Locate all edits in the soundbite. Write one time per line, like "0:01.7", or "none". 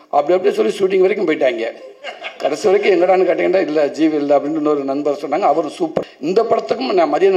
0:06.0